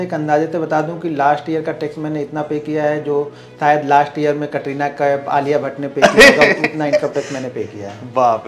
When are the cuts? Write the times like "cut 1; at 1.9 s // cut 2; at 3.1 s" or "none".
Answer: none